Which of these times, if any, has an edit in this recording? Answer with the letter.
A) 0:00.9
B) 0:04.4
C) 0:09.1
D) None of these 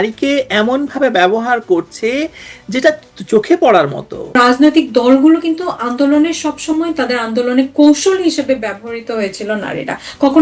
B